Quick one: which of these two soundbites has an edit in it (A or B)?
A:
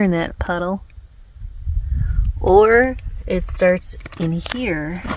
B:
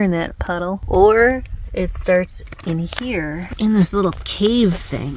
B